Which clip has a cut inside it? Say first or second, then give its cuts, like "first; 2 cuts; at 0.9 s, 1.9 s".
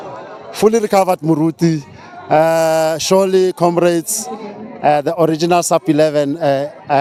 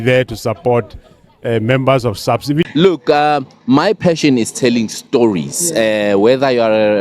second; 1 cut; at 2.7 s